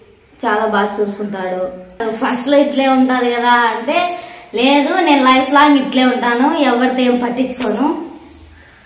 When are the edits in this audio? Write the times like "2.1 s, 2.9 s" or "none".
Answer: 2.0 s